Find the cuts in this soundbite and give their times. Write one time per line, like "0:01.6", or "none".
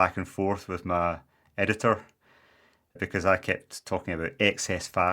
0:03.0